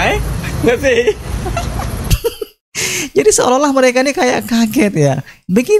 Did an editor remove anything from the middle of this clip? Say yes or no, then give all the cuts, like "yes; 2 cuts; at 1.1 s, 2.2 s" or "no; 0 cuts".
yes; 1 cut; at 1.7 s